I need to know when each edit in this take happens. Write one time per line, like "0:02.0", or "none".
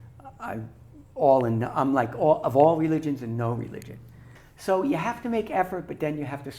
0:04.2